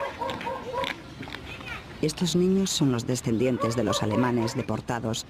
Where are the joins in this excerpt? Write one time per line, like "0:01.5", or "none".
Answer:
none

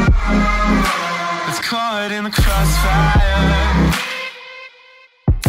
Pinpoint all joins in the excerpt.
0:01.5

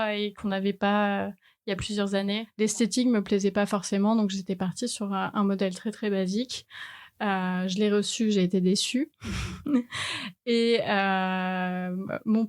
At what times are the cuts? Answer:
0:02.5

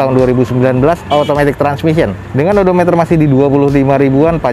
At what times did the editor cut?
none

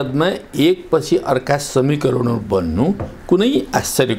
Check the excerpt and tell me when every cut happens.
none

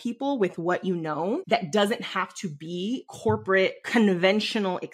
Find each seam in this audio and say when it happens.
0:01.4
0:03.1
0:03.8

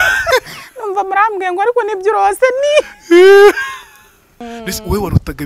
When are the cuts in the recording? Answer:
0:04.4

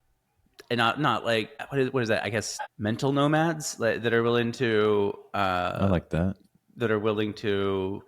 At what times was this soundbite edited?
0:01.6
0:02.7

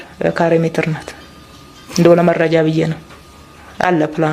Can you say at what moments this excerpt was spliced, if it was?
none

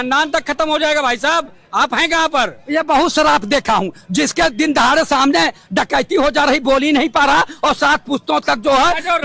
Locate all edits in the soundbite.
none

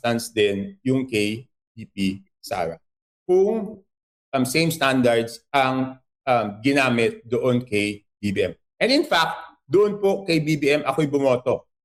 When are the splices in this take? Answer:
none

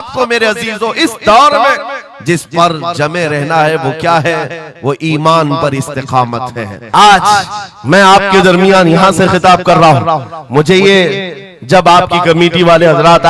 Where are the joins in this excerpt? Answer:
0:06.7

